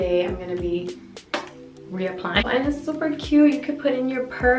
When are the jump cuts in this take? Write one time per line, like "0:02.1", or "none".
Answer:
0:02.4